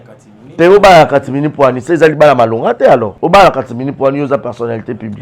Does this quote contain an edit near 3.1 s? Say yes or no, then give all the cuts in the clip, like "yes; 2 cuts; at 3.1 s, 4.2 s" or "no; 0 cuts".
yes; 1 cut; at 3.1 s